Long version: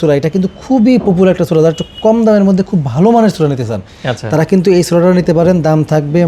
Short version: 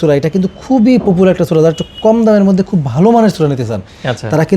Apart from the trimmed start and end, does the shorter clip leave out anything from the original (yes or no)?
no